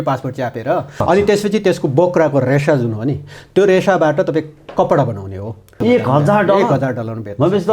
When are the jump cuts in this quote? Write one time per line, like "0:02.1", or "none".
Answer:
0:00.9
0:05.7